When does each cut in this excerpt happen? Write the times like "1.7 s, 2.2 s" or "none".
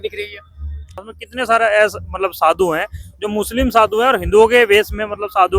1.2 s